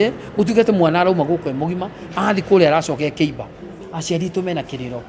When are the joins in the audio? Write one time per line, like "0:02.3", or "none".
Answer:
0:03.9